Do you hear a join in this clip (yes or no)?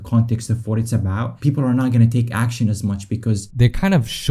yes